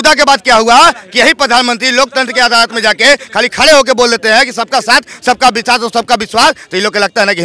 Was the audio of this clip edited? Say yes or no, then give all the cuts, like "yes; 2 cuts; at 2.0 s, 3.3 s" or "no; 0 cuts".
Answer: no; 0 cuts